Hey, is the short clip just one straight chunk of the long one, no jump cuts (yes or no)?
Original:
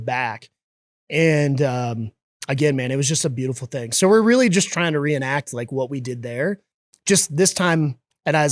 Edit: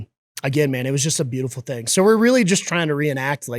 yes